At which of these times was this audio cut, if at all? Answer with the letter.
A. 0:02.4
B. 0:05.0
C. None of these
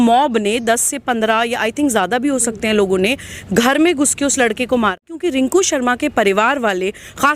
B